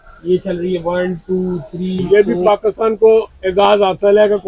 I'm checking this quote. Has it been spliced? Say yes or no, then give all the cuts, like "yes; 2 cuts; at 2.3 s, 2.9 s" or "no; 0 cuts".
yes; 2 cuts; at 2.0 s, 3.4 s